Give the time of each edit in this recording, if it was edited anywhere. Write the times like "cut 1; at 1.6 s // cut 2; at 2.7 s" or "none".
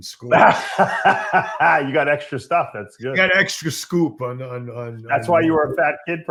none